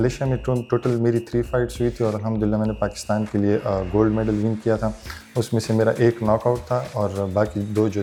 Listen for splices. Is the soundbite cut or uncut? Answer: uncut